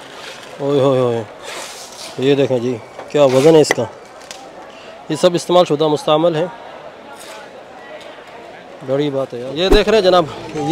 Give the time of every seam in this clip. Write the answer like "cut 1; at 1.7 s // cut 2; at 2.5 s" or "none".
cut 1; at 9.4 s